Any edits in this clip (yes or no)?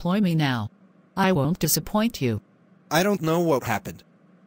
no